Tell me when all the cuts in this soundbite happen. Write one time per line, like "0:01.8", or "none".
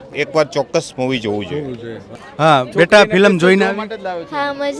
0:02.2